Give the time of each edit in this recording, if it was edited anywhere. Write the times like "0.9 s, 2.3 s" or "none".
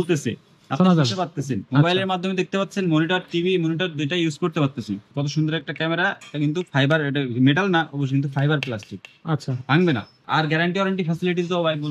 5.1 s, 10.2 s